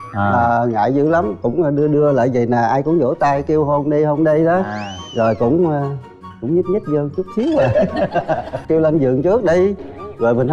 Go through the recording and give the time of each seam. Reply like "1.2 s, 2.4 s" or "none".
8.6 s